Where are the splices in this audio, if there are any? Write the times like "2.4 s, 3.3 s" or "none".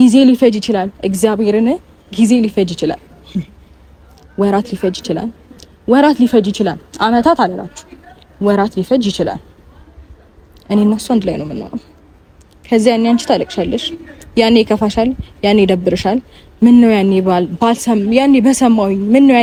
none